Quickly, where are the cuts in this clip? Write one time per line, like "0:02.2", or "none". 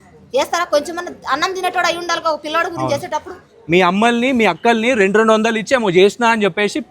0:03.5